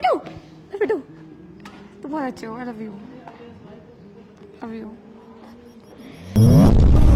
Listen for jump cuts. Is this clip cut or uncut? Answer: uncut